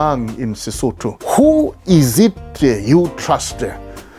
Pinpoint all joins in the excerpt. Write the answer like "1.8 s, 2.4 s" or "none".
1.1 s